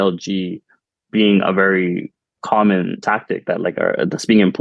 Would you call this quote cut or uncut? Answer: cut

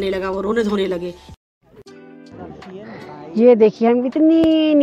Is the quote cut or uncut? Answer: cut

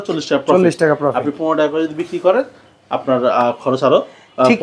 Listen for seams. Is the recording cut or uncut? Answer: uncut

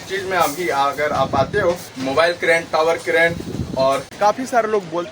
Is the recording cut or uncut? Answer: cut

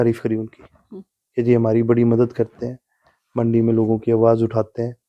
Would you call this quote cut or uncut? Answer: uncut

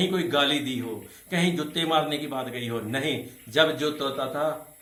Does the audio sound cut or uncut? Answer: uncut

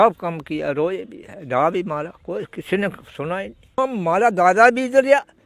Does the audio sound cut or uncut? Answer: cut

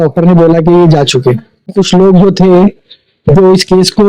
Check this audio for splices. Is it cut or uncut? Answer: cut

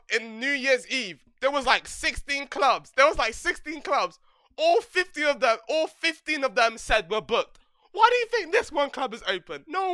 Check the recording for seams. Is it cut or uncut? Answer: uncut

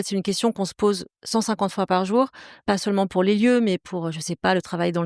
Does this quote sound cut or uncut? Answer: cut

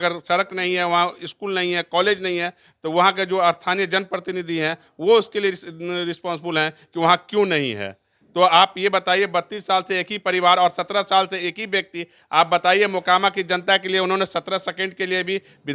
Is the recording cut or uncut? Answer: uncut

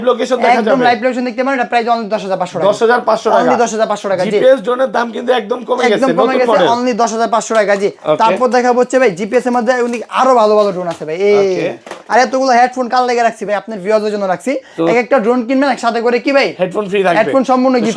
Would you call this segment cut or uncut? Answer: uncut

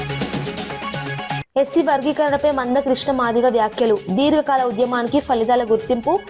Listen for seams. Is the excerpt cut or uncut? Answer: cut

